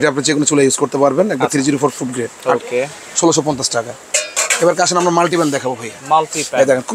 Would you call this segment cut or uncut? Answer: uncut